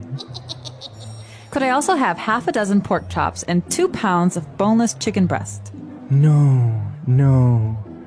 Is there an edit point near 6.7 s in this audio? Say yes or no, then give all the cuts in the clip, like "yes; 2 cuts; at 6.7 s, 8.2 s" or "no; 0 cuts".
no; 0 cuts